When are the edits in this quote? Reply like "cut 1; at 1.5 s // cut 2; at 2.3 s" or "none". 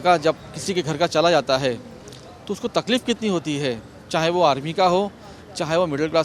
none